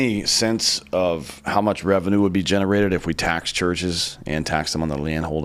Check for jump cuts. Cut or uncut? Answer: uncut